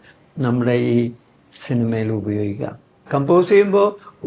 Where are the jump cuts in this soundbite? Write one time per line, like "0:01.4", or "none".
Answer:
0:03.0